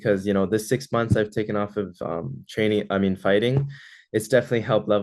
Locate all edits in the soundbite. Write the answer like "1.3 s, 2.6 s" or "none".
none